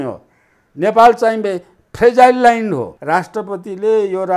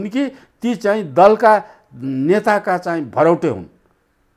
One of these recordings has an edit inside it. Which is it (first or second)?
first